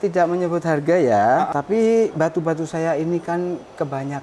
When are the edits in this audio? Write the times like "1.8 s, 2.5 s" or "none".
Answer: 1.5 s